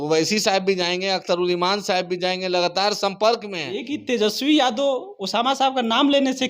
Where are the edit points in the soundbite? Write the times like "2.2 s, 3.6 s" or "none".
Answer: 3.7 s